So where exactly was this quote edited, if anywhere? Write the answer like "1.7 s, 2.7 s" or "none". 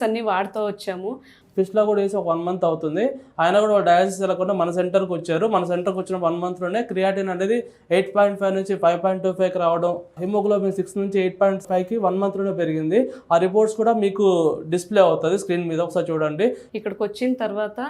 1.3 s, 16.7 s